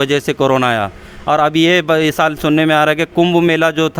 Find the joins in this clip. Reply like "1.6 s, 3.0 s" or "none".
none